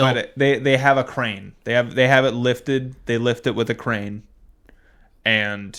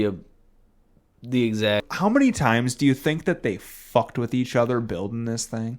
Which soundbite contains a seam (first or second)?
second